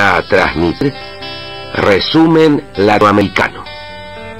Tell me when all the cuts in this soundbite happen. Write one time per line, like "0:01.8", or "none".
0:00.8
0:03.1